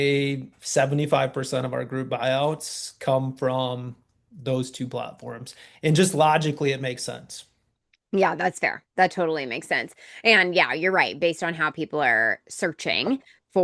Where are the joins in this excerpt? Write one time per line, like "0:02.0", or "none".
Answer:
none